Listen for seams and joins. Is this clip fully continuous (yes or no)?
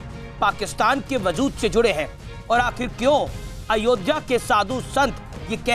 yes